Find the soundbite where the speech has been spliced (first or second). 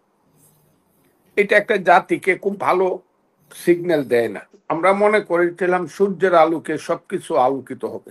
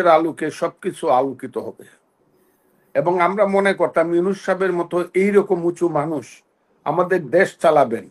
first